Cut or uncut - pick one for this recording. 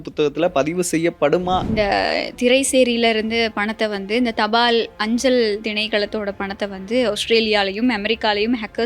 cut